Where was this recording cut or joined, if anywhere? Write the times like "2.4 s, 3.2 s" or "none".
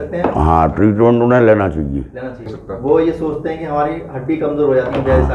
2.5 s

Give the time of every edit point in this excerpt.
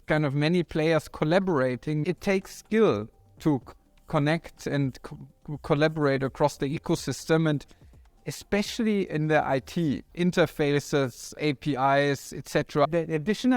2.0 s, 10.1 s, 11.4 s, 12.9 s

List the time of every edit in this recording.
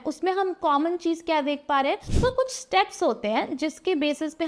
2.1 s

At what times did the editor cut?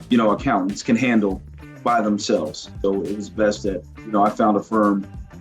2.8 s

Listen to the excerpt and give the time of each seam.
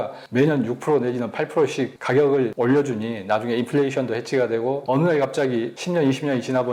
2.0 s, 2.5 s, 4.8 s, 5.8 s

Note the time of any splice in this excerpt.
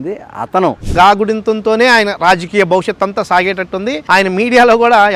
0.9 s, 4.0 s

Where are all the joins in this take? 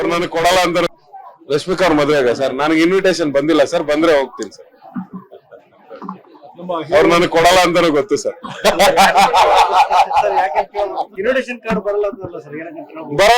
0.9 s

